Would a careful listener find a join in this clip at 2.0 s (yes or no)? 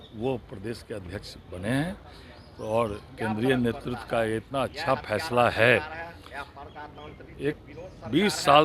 no